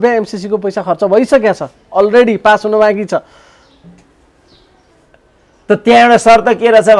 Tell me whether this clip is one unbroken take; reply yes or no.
yes